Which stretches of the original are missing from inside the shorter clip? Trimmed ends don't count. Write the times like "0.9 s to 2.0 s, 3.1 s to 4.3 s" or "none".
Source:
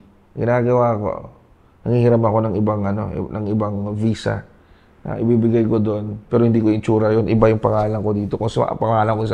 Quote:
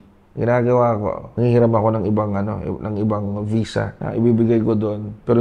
1.2 s to 1.7 s, 4.5 s to 5.0 s